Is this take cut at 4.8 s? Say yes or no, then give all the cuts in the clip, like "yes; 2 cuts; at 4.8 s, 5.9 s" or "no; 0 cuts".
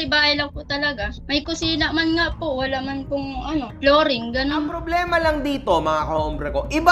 yes; 1 cut; at 4.8 s